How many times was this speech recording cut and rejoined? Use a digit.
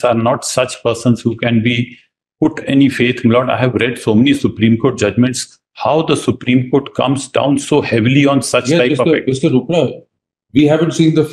0